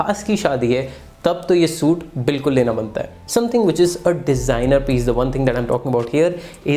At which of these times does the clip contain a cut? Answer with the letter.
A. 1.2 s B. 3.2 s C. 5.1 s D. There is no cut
B